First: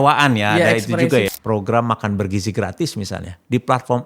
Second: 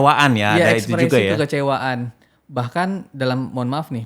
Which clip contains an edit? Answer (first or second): first